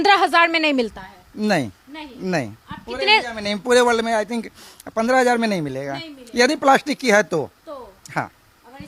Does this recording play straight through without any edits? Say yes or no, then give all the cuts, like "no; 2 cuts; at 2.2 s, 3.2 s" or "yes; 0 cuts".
yes; 0 cuts